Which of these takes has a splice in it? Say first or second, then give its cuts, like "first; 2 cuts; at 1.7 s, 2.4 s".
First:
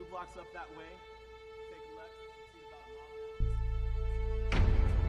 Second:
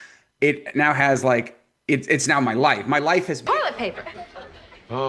second; 1 cut; at 3.5 s